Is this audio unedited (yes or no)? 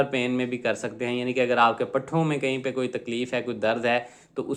yes